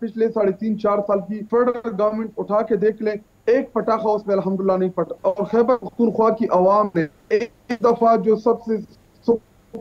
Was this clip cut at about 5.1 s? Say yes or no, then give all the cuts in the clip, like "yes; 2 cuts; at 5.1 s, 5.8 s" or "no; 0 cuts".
yes; 2 cuts; at 1.4 s, 5.1 s